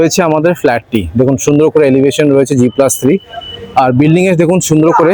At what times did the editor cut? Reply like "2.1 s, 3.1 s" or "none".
none